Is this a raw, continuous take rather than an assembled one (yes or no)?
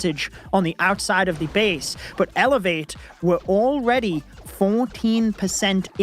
yes